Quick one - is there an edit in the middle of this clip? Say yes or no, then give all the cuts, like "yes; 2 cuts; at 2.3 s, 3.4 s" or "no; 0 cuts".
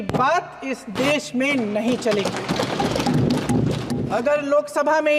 yes; 1 cut; at 4.1 s